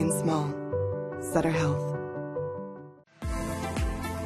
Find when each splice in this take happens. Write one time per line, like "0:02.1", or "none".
0:02.9